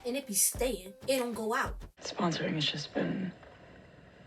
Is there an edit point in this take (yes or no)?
no